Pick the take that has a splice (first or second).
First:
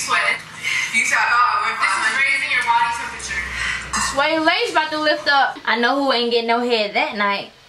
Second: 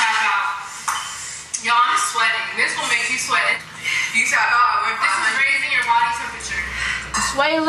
first